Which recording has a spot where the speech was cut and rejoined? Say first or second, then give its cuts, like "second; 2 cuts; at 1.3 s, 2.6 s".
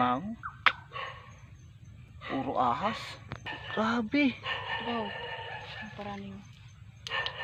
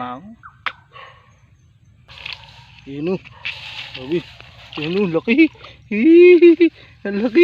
second; 1 cut; at 2.1 s